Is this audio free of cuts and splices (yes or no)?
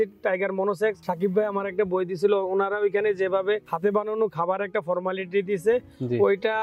no